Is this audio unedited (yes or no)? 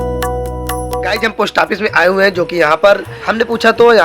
no